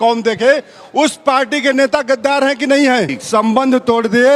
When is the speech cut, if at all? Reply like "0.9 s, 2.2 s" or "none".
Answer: 3.2 s